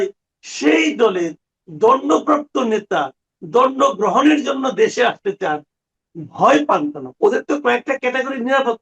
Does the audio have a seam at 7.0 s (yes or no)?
yes